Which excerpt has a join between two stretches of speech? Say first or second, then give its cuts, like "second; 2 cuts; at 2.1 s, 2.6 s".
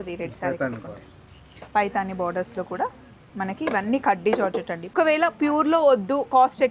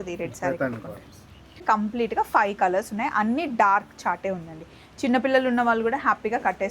second; 1 cut; at 1.6 s